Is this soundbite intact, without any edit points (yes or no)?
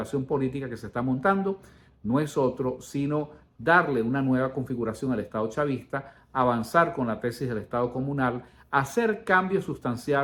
yes